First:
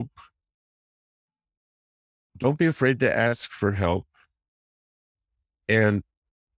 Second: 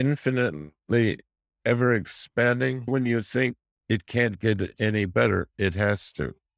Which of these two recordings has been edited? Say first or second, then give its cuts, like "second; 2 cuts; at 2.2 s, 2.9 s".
second; 1 cut; at 2.8 s